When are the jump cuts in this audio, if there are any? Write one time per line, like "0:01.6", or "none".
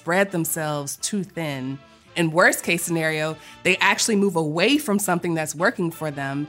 none